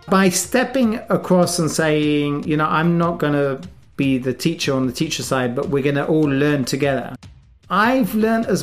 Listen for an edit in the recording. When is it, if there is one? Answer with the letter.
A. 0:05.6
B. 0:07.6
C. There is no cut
B